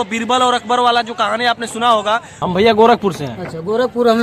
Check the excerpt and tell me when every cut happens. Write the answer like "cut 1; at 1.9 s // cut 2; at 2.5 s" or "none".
cut 1; at 2.3 s